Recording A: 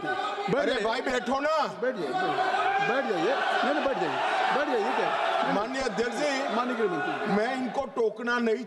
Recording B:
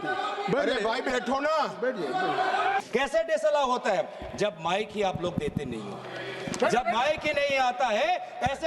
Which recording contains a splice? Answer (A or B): B